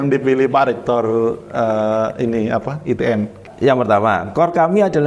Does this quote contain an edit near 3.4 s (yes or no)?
yes